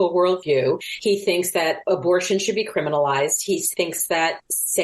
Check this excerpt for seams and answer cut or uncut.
uncut